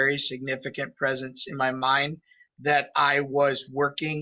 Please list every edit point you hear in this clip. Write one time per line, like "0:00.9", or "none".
none